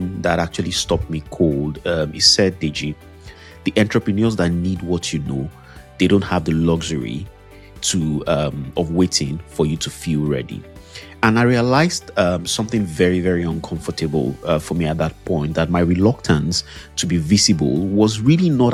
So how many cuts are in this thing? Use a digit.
0